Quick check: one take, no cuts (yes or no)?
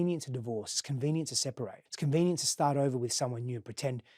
no